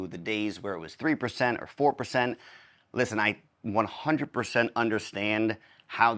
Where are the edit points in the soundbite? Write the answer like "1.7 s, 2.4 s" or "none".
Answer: none

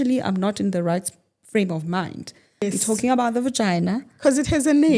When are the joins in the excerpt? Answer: 2.7 s

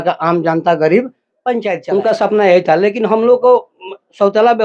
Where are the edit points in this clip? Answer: 1.7 s

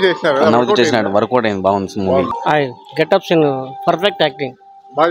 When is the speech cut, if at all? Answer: 2.3 s

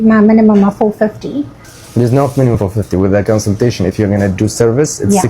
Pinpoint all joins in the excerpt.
1.8 s

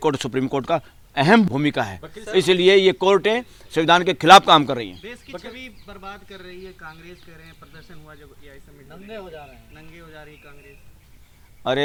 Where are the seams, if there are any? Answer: none

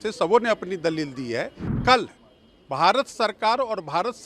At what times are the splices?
1.8 s

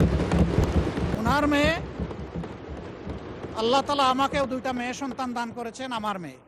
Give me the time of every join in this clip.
1.1 s

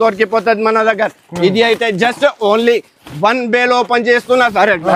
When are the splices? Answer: none

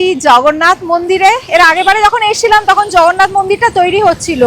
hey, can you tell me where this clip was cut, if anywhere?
none

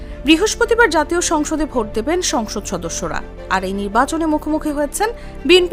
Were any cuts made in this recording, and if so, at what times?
none

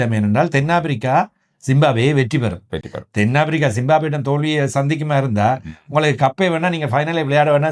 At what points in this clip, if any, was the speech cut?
none

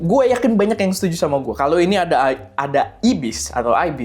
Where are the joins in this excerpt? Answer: 1.5 s

